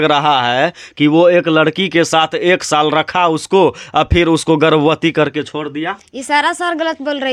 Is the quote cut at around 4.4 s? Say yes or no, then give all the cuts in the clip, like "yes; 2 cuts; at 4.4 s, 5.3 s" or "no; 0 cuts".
no; 0 cuts